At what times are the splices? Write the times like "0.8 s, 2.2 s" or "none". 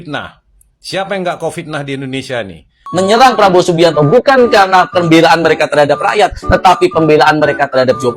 2.8 s